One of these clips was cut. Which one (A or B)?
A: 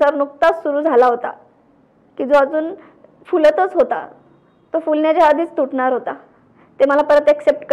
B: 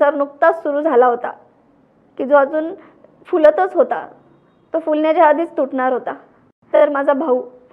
B